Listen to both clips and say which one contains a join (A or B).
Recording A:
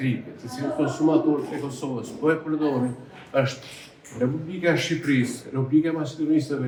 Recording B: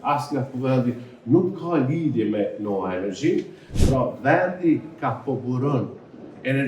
B